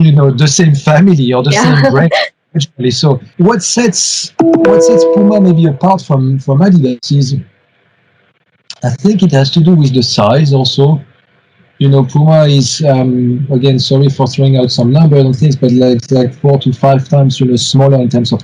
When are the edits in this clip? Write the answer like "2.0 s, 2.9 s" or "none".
3.3 s